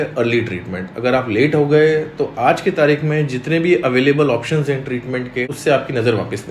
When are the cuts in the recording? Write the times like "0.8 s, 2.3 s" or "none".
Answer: 5.5 s